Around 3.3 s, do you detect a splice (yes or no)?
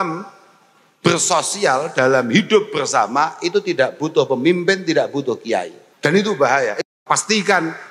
no